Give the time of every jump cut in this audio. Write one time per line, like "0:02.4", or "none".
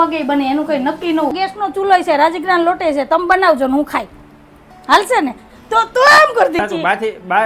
0:01.3
0:06.6